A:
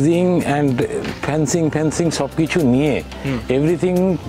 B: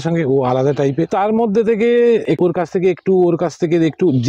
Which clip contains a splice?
B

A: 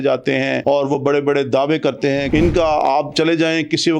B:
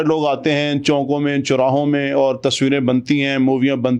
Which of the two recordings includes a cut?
A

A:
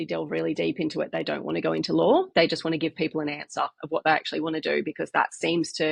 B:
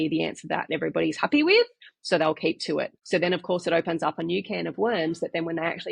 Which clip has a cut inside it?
B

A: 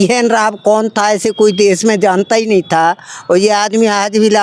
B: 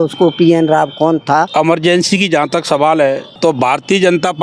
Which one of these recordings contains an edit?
B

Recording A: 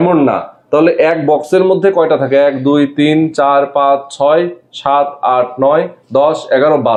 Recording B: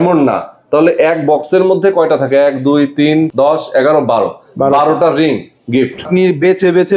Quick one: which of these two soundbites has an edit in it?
B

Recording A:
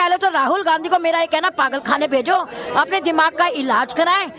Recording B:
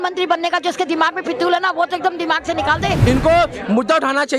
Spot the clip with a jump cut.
B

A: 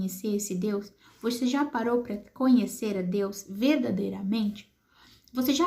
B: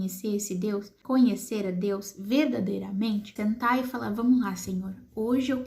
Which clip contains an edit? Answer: B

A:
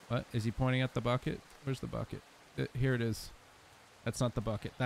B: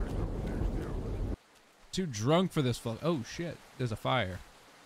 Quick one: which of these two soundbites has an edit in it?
B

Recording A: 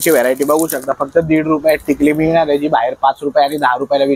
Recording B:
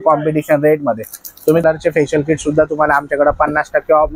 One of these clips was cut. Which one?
B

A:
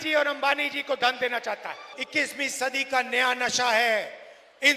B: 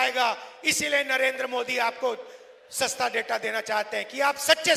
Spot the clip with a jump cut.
A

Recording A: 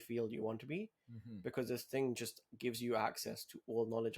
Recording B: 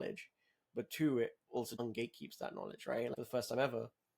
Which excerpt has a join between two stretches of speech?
B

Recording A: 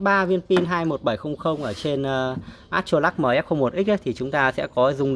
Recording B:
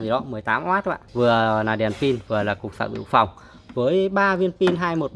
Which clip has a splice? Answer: B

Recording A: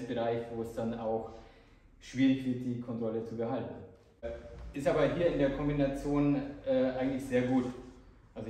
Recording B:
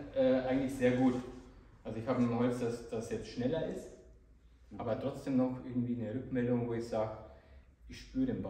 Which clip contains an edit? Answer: A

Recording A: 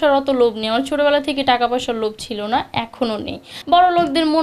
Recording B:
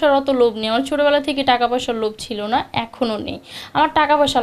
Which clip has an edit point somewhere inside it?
A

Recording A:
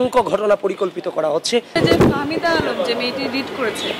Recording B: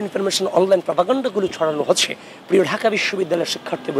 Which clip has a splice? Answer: A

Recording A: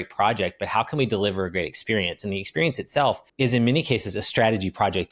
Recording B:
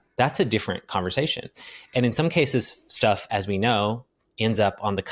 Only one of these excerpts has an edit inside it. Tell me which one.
A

